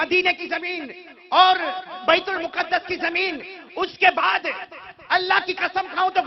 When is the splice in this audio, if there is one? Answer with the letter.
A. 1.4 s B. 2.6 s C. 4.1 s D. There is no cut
D